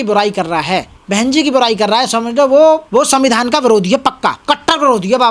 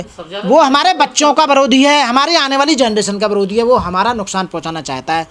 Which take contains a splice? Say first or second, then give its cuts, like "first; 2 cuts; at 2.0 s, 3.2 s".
first; 3 cuts; at 1.0 s, 2.8 s, 4.4 s